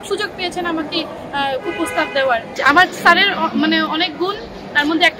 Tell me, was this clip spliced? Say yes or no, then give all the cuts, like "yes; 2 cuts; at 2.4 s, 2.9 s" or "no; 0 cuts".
yes; 1 cut; at 2.5 s